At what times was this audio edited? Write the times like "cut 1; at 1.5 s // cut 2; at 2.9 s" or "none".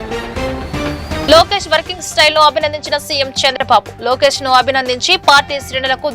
cut 1; at 1.2 s